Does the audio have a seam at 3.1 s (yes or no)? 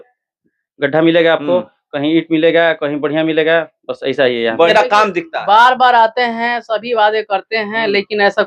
no